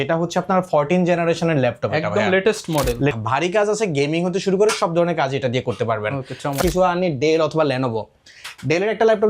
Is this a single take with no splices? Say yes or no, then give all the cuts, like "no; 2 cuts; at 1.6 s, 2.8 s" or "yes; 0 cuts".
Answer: no; 2 cuts; at 3.1 s, 6.6 s